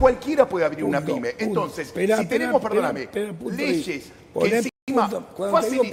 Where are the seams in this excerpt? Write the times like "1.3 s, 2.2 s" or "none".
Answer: none